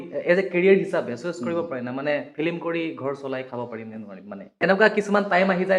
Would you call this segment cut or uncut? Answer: cut